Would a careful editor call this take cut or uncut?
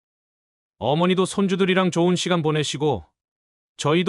uncut